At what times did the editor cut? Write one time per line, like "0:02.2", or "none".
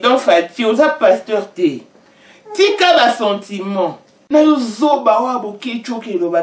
0:04.1